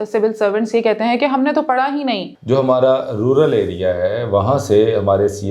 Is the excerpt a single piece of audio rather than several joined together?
no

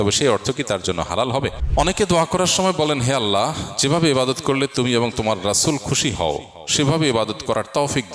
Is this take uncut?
no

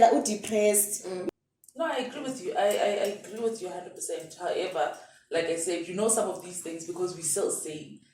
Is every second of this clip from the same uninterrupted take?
no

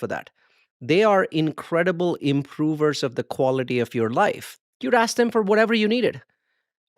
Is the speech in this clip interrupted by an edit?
yes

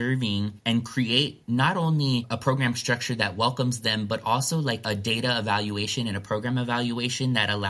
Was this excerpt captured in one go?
yes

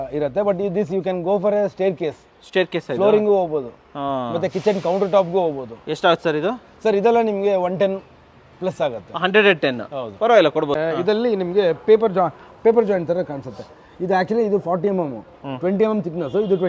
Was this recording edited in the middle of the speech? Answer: yes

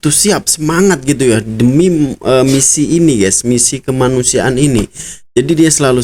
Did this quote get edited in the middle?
no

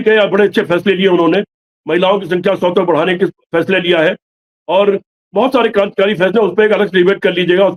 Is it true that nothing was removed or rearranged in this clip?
yes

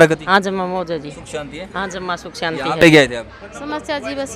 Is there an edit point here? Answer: yes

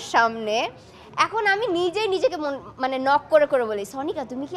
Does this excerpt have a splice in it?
no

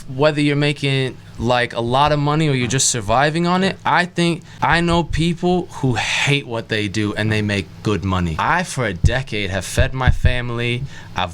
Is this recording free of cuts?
no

